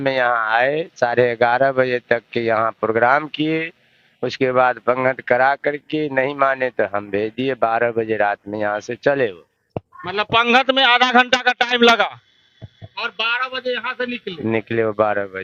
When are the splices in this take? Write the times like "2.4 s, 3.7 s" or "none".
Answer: none